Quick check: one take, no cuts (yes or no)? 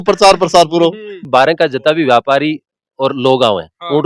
no